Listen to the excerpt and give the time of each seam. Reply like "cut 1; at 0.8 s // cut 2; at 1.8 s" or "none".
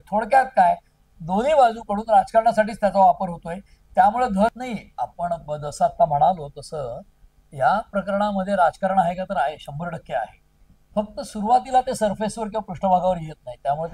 cut 1; at 4.5 s